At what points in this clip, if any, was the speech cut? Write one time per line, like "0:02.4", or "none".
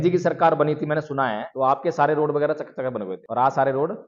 0:01.4
0:03.2